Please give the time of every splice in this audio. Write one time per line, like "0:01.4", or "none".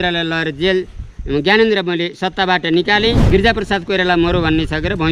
0:03.2